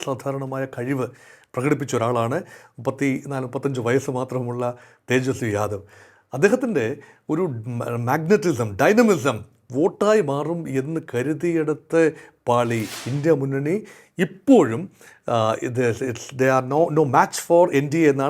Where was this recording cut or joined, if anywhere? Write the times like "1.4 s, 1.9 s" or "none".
12.9 s

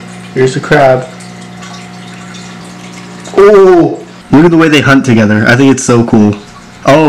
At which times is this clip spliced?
2.6 s, 4.1 s

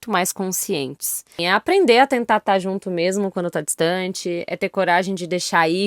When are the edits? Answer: 1.4 s

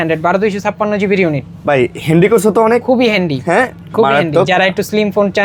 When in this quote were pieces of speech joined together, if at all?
none

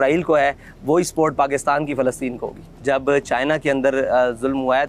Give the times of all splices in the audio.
2.7 s

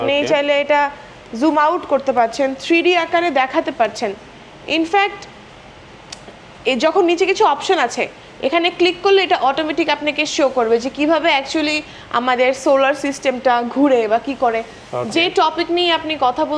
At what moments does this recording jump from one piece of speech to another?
none

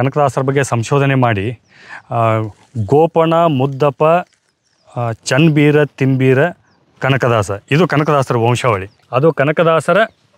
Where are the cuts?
8.9 s

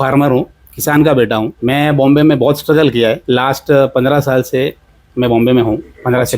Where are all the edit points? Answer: 1.5 s, 3.2 s

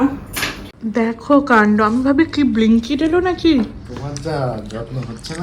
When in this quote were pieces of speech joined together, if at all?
0.9 s

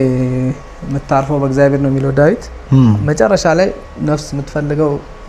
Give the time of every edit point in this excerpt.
none

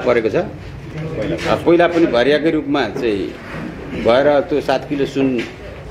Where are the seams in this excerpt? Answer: 1.0 s

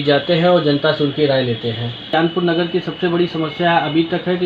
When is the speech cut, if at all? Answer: 2.1 s

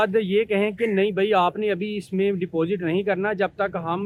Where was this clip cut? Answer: none

